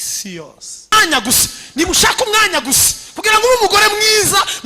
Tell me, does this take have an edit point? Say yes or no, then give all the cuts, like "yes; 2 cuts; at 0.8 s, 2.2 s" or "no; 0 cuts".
yes; 1 cut; at 0.9 s